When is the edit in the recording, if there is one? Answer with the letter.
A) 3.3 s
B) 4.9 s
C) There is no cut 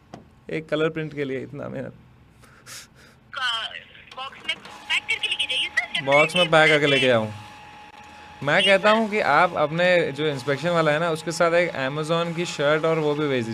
A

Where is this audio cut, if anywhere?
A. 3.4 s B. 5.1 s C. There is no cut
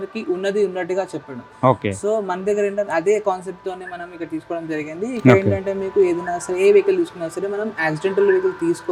C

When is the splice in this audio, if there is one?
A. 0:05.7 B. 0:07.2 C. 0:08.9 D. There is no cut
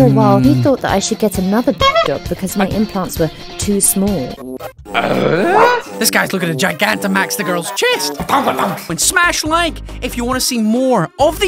C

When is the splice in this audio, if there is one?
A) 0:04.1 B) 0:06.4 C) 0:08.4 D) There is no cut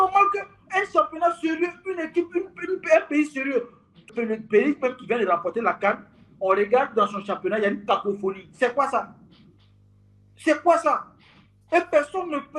A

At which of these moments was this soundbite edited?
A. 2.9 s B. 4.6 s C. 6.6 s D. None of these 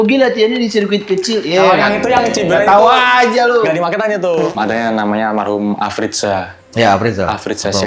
B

